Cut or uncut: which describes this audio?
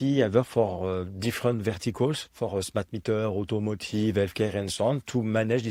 uncut